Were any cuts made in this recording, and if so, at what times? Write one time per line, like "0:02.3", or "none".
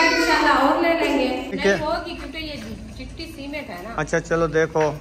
0:01.6